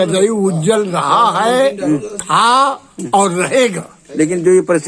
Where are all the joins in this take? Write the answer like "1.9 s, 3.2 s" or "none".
none